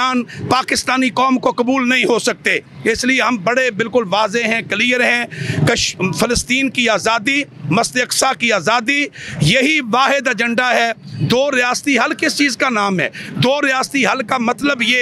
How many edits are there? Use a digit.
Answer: 0